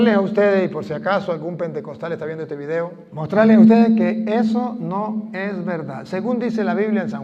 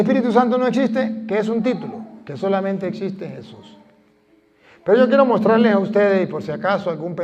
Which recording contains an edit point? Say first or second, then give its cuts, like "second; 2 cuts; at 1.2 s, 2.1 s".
first; 1 cut; at 3.1 s